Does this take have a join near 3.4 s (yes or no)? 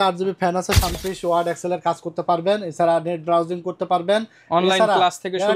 no